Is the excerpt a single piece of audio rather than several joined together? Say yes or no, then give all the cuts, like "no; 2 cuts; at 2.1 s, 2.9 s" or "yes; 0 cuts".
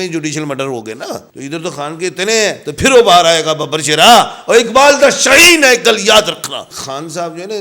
no; 2 cuts; at 1.3 s, 6.5 s